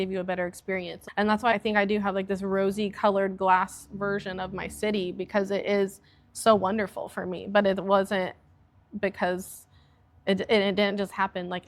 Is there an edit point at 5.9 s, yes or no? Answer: no